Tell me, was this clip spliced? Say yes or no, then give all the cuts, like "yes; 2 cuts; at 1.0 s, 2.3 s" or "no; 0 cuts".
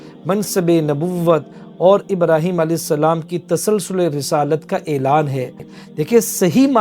yes; 1 cut; at 5.7 s